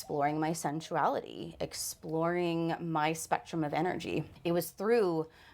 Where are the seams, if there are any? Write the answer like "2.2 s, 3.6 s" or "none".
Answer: 4.3 s